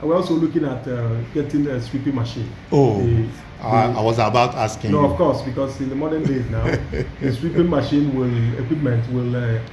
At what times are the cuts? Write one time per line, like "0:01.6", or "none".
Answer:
none